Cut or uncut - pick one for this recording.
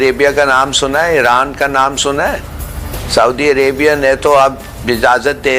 uncut